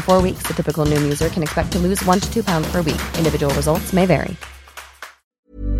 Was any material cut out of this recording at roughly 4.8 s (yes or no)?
yes